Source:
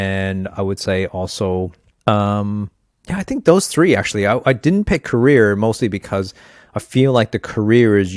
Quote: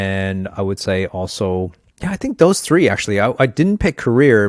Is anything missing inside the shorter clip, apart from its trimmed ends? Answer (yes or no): yes